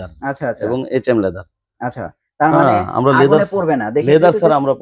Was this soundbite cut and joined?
no; 0 cuts

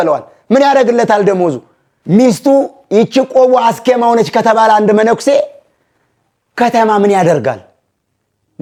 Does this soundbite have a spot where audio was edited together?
no; 0 cuts

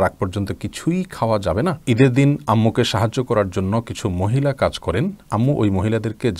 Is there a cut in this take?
yes; 1 cut; at 1.8 s

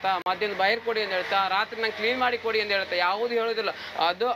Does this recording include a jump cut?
no; 0 cuts

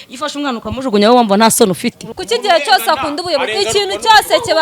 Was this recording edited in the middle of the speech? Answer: yes; 1 cut; at 2.1 s

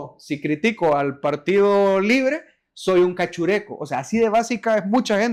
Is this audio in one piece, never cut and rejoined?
yes; 0 cuts

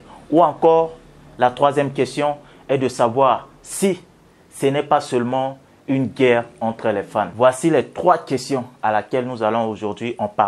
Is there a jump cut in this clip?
yes; 1 cut; at 7.3 s

